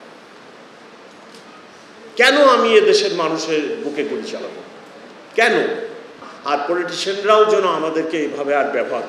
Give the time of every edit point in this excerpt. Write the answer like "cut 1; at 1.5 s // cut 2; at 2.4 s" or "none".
cut 1; at 6.3 s